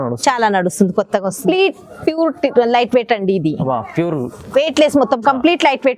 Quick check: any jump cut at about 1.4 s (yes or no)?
yes